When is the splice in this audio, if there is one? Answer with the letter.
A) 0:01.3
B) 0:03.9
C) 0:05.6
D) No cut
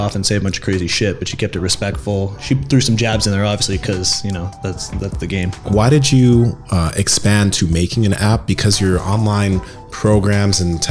C